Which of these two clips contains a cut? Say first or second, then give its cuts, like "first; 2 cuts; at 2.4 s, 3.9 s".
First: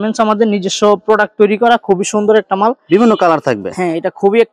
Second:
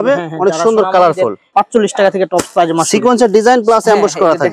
second; 1 cut; at 1.4 s